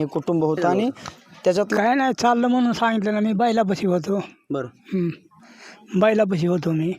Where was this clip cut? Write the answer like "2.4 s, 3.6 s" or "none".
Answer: 1.8 s